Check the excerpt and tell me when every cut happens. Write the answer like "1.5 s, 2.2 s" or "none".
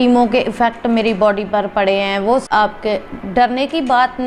2.4 s